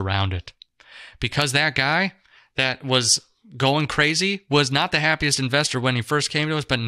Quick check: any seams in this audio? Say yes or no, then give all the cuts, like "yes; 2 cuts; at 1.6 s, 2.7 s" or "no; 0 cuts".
no; 0 cuts